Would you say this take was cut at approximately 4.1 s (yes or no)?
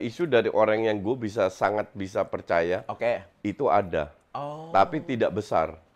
no